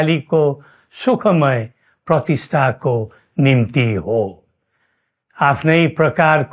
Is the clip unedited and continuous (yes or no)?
yes